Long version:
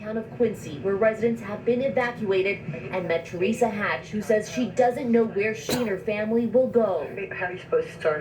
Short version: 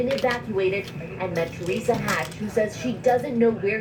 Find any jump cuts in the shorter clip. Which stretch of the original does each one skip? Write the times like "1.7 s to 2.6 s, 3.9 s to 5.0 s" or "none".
none